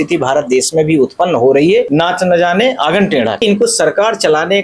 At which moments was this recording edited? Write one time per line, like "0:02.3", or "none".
0:01.9
0:03.4